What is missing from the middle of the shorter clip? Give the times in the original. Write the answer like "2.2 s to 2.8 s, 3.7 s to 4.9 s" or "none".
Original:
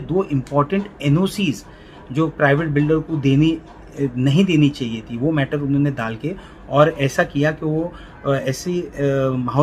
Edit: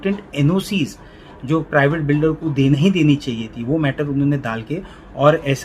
3.4 s to 4.3 s